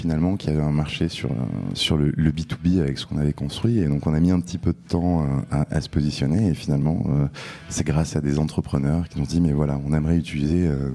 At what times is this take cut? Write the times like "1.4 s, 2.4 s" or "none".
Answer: 1.8 s, 9.1 s